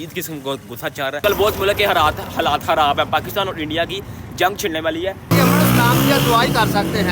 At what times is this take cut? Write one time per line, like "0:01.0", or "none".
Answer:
0:01.2
0:05.3